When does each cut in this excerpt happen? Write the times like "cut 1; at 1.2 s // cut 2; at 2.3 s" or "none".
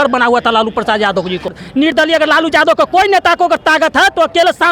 cut 1; at 1.6 s